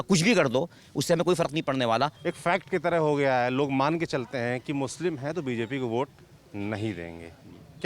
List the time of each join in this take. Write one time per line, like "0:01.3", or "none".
0:02.2